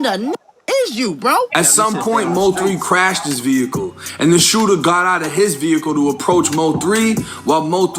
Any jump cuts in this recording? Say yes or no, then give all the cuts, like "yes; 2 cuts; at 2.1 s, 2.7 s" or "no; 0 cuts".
yes; 1 cut; at 1.5 s